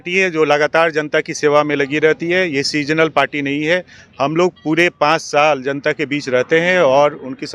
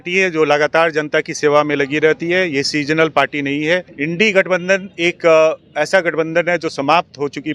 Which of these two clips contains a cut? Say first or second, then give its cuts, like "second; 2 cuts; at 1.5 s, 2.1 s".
second; 1 cut; at 3.9 s